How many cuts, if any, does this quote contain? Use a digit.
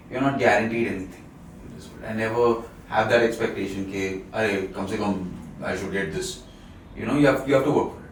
0